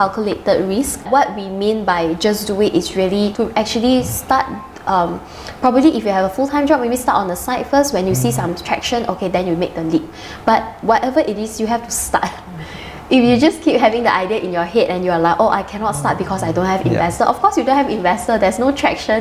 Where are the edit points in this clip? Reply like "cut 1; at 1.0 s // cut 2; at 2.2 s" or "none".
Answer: cut 1; at 1.0 s // cut 2; at 3.3 s